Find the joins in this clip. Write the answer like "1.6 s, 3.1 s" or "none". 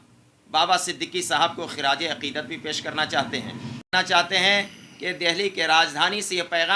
3.9 s